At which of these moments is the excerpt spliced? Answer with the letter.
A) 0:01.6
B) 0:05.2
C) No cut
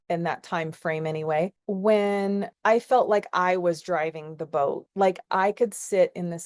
A